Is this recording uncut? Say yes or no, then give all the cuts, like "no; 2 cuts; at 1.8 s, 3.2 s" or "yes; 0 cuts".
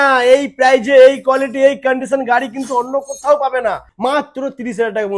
no; 1 cut; at 3.9 s